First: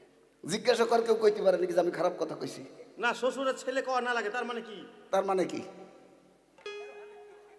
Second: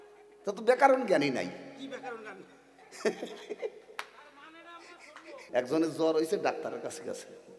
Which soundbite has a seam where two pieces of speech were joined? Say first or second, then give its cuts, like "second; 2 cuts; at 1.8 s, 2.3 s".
second; 1 cut; at 5.4 s